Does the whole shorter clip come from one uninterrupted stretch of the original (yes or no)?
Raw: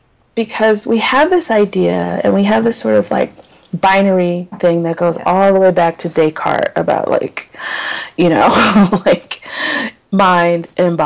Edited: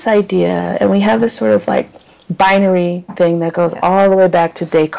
yes